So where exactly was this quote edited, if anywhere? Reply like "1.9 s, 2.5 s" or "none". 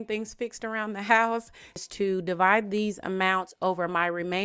1.8 s